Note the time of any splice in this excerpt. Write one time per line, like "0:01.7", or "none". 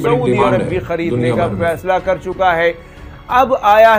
none